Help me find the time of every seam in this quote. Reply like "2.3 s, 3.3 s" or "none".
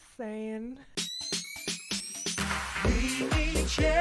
1.0 s